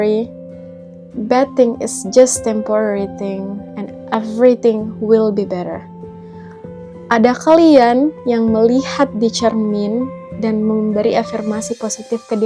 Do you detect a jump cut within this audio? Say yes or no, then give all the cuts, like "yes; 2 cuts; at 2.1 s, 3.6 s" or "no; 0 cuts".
no; 0 cuts